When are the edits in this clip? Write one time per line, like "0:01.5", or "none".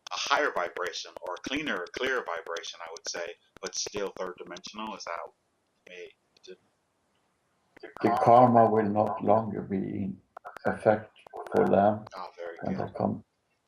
0:11.2